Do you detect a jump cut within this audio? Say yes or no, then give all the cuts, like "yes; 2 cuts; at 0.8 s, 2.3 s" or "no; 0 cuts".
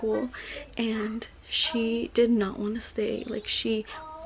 no; 0 cuts